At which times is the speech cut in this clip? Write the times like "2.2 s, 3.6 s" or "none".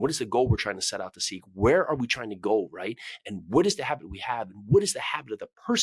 none